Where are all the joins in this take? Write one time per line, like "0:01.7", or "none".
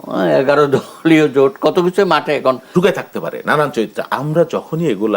0:02.7